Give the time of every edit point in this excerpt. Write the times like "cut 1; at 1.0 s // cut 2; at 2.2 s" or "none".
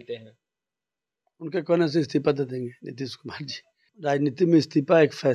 cut 1; at 3.9 s